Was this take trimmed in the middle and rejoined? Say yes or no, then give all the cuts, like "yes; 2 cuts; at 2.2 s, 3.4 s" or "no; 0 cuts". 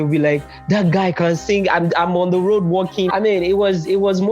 yes; 1 cut; at 3.1 s